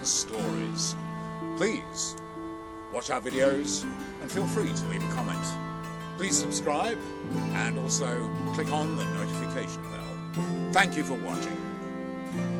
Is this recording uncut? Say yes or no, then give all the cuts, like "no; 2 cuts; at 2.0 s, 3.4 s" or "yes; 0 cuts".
yes; 0 cuts